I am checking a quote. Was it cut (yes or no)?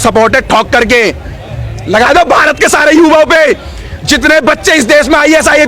no